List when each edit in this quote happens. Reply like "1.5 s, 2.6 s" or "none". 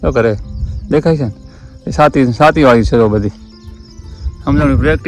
none